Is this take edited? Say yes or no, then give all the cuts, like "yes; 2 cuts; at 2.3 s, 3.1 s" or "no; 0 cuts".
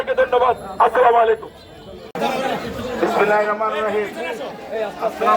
yes; 1 cut; at 2.1 s